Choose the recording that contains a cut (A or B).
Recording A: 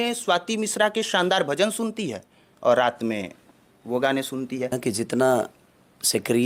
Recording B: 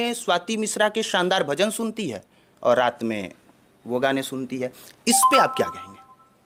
A